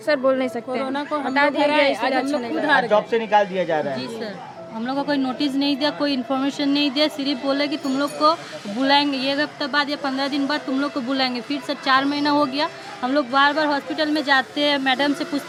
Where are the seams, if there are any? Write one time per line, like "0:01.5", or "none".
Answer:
none